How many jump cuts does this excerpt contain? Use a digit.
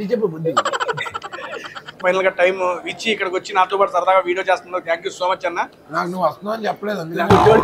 1